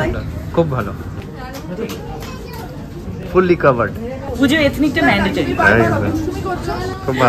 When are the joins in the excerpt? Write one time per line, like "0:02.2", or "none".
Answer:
none